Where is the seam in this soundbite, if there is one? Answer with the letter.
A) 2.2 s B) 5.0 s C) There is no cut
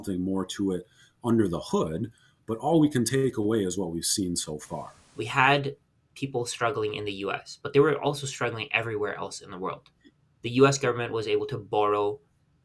B